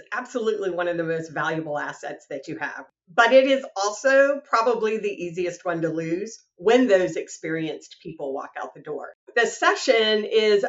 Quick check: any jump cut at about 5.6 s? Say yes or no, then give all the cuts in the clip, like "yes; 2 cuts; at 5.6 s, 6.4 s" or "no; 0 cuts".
no; 2 cuts; at 2.9 s, 9.3 s